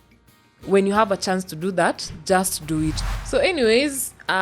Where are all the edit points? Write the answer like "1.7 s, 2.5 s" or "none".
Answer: 3.1 s